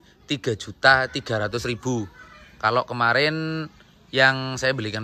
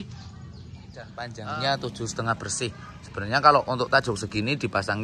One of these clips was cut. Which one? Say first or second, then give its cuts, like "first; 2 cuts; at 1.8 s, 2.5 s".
second; 1 cut; at 1.2 s